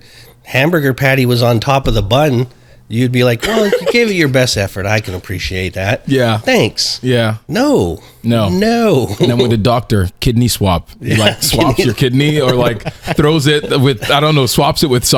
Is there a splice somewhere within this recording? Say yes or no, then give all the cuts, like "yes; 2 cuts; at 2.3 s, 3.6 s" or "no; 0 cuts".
no; 0 cuts